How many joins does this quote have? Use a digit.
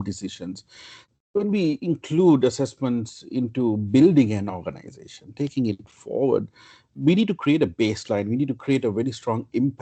0